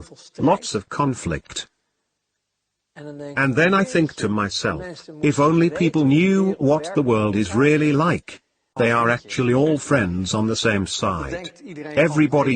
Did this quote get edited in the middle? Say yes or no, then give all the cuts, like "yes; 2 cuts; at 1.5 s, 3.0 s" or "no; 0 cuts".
yes; 1 cut; at 8.7 s